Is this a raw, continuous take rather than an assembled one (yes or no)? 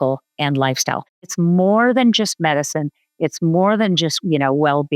no